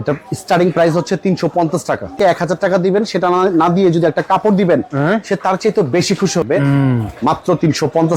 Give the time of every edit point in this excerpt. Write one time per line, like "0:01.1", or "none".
0:02.1
0:06.4